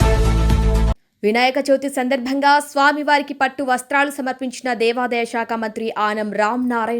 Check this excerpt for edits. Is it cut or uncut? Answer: cut